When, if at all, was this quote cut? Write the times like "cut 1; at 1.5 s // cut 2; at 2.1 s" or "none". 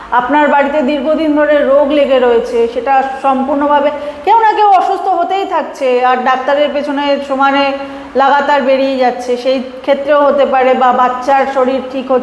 none